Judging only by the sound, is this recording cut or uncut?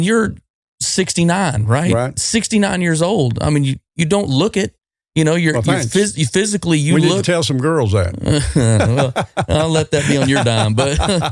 uncut